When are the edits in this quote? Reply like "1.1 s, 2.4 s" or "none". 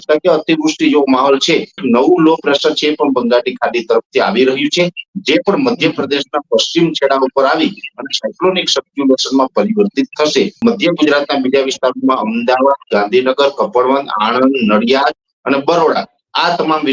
1.8 s, 10.6 s